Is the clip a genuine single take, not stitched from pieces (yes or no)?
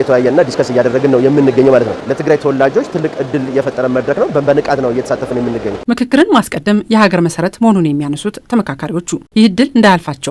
yes